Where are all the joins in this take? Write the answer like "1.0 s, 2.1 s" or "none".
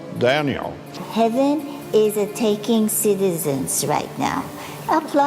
1.0 s